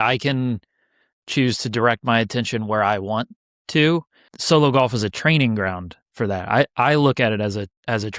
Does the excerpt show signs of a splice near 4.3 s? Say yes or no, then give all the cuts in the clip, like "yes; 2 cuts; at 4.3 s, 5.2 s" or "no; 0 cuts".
yes; 1 cut; at 4.3 s